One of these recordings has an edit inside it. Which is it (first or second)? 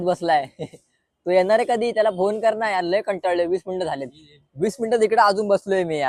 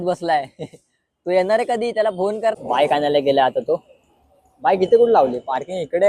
second